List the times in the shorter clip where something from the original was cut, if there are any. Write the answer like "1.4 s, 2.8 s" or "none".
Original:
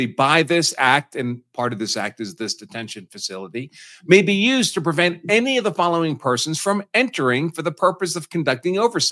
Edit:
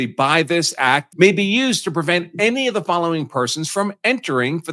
1.1 s